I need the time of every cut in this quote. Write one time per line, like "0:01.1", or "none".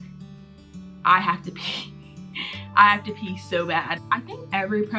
0:04.0